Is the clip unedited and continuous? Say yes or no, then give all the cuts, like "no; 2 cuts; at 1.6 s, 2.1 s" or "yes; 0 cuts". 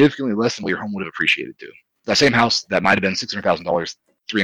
no; 1 cut; at 1.9 s